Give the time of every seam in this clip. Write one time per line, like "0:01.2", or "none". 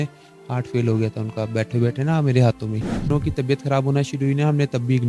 0:03.1